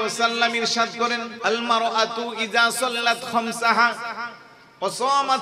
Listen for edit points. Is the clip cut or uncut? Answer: cut